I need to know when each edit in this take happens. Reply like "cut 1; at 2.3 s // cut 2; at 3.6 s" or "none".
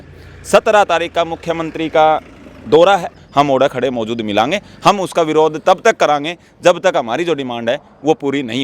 cut 1; at 3.2 s